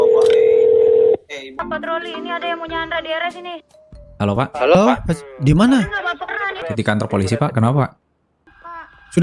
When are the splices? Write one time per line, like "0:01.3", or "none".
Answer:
0:01.6
0:06.6

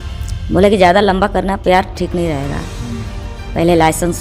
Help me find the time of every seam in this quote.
none

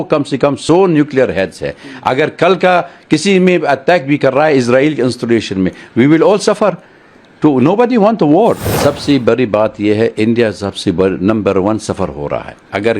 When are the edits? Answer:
0:08.6

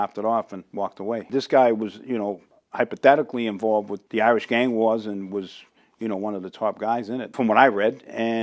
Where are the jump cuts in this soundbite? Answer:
0:01.2
0:04.0
0:07.3

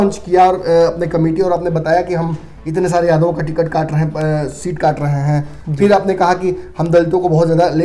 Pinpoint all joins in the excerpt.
none

